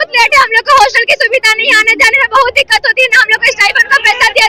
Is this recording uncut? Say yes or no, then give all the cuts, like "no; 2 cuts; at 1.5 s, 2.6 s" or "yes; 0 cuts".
yes; 0 cuts